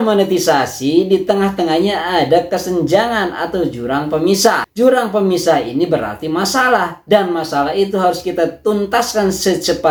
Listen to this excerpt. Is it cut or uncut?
uncut